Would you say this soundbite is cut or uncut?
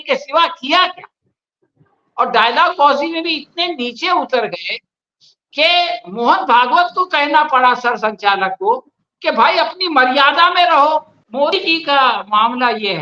cut